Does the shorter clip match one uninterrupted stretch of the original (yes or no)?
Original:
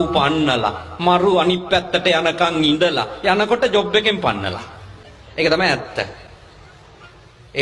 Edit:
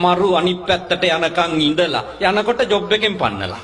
yes